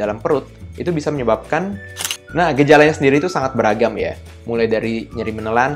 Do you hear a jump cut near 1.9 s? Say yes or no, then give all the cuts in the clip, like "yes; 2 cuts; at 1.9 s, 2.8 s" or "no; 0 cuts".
yes; 1 cut; at 1.9 s